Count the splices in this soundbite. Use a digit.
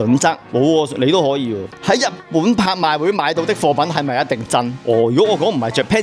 2